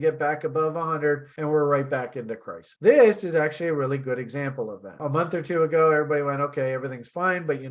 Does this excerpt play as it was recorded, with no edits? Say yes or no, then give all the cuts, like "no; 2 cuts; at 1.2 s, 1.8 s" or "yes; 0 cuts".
no; 2 cuts; at 2.6 s, 5.0 s